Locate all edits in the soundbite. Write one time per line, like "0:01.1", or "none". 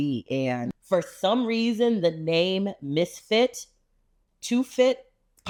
none